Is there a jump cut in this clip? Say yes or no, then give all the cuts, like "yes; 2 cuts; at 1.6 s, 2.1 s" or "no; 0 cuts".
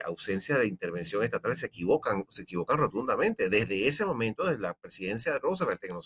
no; 0 cuts